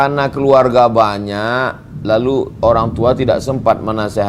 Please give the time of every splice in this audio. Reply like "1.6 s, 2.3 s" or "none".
none